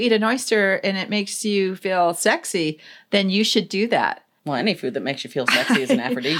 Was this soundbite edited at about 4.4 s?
yes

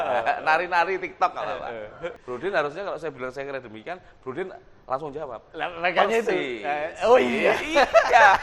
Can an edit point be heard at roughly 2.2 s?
yes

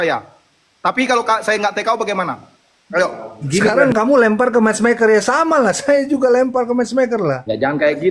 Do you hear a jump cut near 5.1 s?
no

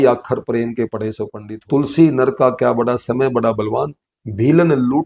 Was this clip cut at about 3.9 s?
no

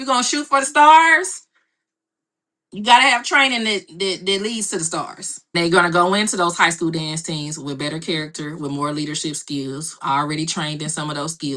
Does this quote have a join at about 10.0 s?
no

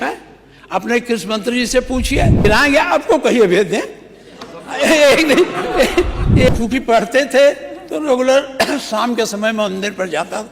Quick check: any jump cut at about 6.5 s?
yes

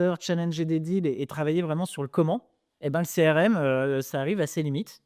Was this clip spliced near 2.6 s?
no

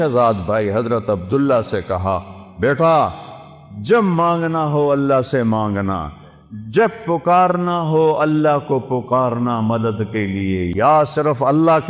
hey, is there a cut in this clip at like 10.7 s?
yes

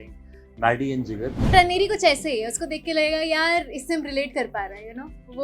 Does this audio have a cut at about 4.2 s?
no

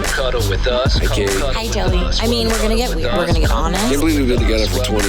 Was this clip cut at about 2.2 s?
no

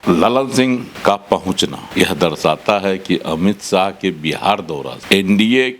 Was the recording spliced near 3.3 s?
no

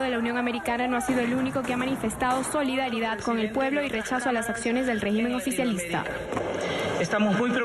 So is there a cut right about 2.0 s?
yes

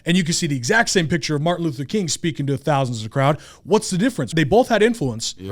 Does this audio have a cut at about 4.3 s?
yes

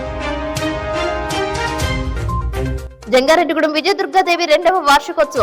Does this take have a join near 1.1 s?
no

